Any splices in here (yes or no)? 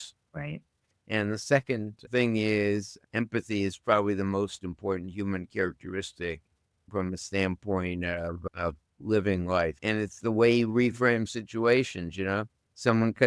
yes